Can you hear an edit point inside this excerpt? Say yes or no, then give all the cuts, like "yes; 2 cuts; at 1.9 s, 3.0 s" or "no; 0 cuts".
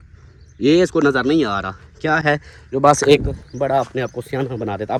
no; 0 cuts